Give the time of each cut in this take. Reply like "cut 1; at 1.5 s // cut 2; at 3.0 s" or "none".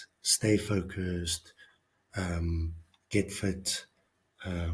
none